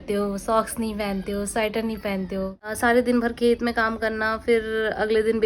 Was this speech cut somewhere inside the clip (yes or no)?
yes